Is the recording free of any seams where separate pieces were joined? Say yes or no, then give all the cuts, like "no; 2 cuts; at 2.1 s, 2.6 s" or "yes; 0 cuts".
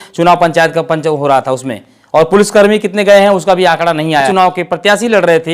no; 1 cut; at 4.3 s